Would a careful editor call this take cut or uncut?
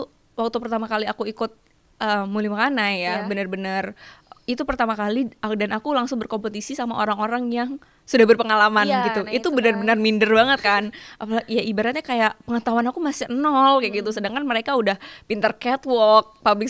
uncut